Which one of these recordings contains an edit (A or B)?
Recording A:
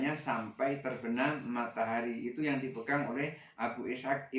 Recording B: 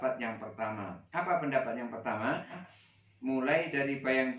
B